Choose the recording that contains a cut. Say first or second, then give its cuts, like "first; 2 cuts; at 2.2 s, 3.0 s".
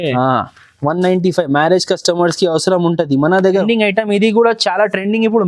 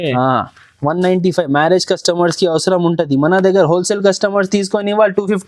first; 1 cut; at 3.6 s